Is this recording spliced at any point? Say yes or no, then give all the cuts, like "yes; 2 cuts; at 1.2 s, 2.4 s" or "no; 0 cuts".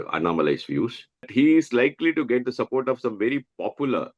yes; 1 cut; at 1.3 s